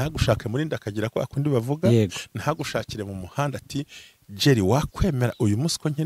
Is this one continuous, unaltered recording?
yes; 0 cuts

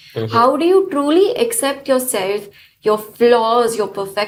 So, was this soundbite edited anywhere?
no; 0 cuts

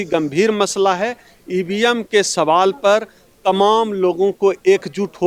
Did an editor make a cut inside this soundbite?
no; 0 cuts

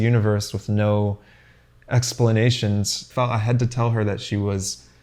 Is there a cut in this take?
yes; 1 cut; at 3.1 s

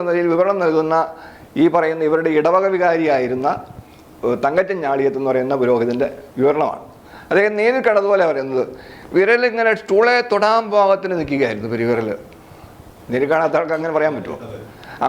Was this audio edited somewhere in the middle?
no; 0 cuts

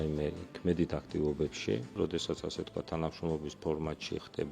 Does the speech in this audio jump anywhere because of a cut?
yes; 1 cut; at 2.0 s

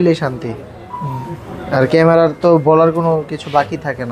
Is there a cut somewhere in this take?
no; 0 cuts

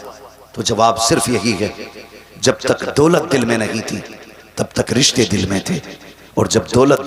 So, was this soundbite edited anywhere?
no; 0 cuts

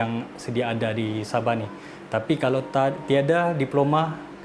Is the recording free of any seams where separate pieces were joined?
yes; 0 cuts

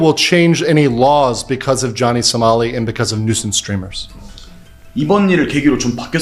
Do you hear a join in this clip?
no; 0 cuts

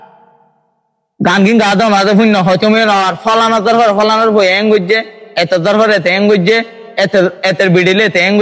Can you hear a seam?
no; 0 cuts

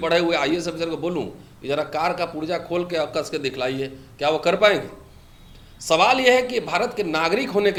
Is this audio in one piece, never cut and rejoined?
yes; 0 cuts

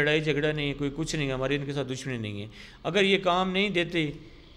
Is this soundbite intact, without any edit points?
yes; 0 cuts

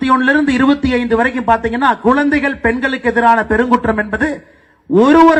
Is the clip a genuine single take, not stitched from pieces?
yes; 0 cuts

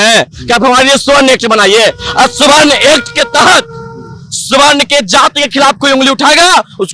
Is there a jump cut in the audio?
no; 0 cuts

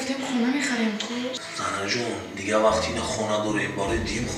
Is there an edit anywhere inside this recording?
no; 0 cuts

